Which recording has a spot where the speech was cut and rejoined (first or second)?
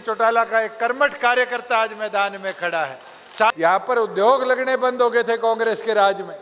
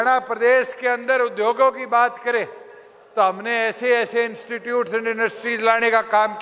first